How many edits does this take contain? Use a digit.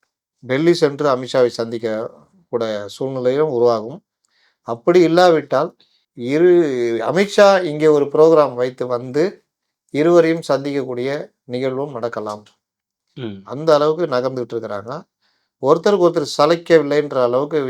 0